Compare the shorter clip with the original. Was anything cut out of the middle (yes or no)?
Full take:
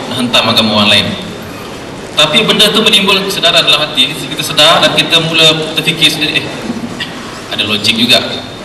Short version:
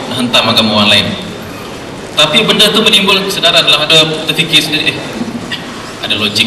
yes